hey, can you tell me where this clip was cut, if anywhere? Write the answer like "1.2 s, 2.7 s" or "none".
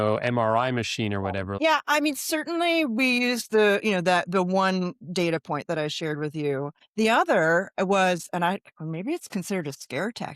1.5 s